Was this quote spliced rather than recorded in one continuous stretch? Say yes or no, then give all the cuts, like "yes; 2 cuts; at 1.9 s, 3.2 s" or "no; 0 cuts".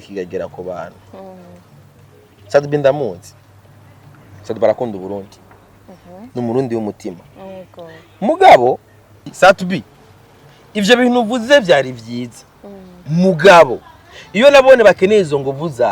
yes; 1 cut; at 9.3 s